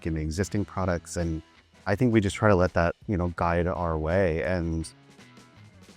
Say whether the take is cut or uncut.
uncut